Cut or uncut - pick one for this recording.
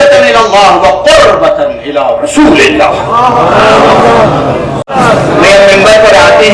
cut